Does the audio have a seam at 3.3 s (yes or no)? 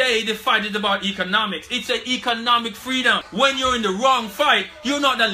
yes